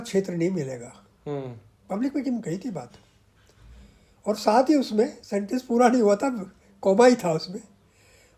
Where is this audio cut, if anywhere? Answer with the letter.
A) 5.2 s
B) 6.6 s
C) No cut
C